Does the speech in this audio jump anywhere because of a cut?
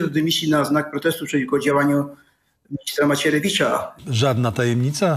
yes; 1 cut; at 4.0 s

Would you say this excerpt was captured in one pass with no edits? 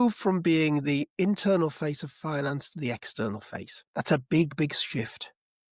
no; 1 cut; at 3.8 s

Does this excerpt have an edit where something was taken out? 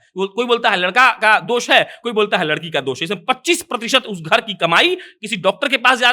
no; 0 cuts

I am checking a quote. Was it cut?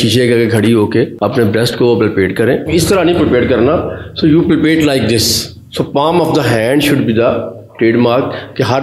yes; 2 cuts; at 1.1 s, 2.7 s

